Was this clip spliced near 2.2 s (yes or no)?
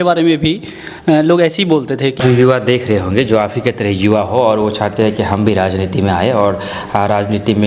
yes